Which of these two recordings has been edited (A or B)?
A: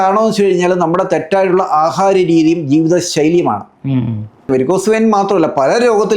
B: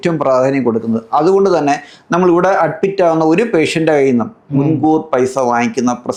A